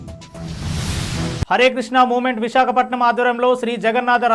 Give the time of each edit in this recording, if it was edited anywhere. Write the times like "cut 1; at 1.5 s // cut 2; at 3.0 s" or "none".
cut 1; at 1.4 s